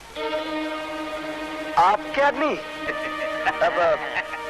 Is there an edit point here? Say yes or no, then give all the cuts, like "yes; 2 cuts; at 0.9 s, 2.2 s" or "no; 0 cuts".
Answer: yes; 1 cut; at 2.8 s